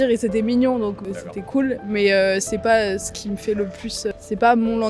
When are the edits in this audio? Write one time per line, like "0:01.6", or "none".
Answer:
0:01.1